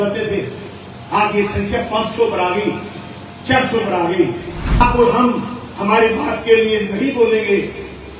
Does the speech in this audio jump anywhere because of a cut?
yes; 1 cut; at 4.8 s

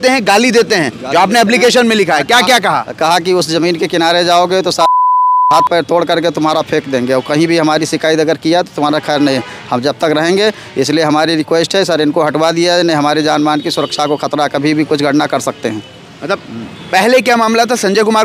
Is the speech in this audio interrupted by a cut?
no; 0 cuts

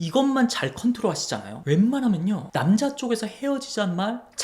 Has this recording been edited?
yes; 1 cut; at 1.5 s

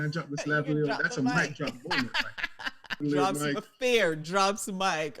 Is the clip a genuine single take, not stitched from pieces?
no; 1 cut; at 3.0 s

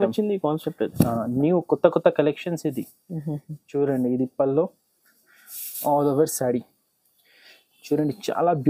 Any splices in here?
no; 0 cuts

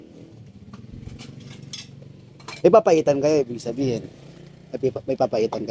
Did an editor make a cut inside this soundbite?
no; 0 cuts

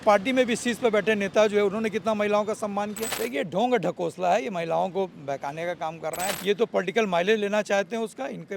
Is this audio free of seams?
no; 2 cuts; at 3.1 s, 6.3 s

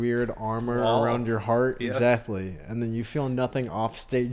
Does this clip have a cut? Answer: no; 0 cuts

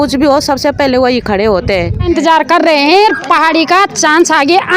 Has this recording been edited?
yes; 1 cut; at 2.1 s

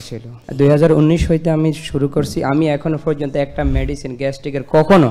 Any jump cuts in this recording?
no; 0 cuts

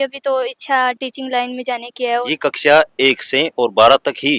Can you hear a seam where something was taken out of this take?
yes; 1 cut; at 2.2 s

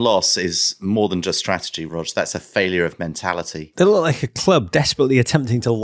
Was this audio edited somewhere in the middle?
yes; 2 cuts; at 1.8 s, 3.6 s

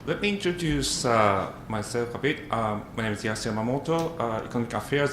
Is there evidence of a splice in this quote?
yes; 1 cut; at 1.3 s

